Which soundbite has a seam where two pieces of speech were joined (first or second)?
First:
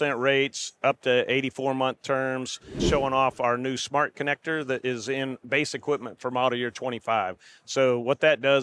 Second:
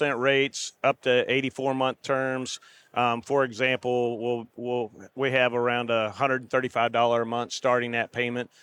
first